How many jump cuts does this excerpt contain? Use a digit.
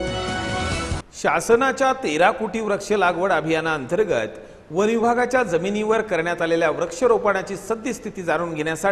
1